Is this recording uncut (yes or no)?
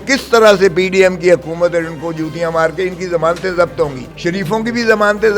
no